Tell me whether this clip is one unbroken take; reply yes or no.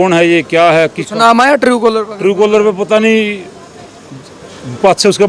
yes